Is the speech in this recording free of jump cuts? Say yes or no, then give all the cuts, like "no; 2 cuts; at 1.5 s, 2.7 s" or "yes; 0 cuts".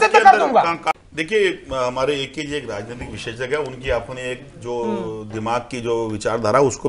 no; 1 cut; at 0.9 s